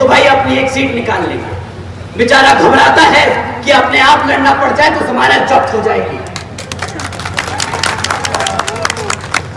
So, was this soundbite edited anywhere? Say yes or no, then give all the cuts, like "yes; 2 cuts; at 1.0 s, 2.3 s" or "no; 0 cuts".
no; 0 cuts